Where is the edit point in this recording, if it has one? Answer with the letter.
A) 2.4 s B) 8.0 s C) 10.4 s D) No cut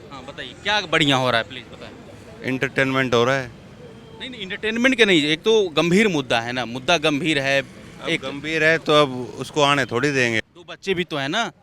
C